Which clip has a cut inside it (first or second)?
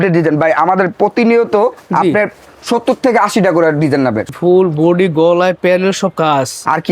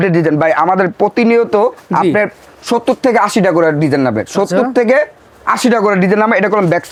first